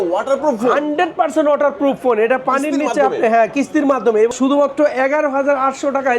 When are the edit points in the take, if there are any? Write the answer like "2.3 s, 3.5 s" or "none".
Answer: 4.3 s